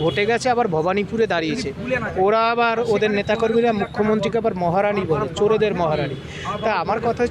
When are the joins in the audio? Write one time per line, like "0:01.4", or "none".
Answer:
none